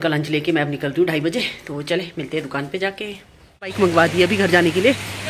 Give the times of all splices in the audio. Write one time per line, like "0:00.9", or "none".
0:03.8